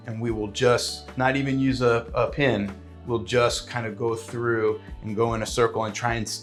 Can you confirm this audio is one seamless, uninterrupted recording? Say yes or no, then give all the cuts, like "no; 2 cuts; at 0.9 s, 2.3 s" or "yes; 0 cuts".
yes; 0 cuts